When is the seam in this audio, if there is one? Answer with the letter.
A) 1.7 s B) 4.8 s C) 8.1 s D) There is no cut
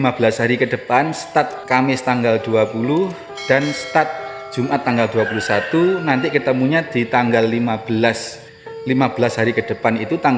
A